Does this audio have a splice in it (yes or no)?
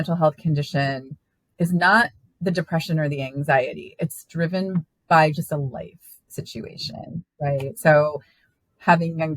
no